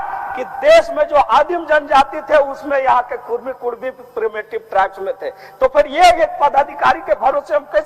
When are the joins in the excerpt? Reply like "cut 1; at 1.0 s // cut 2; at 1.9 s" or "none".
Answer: none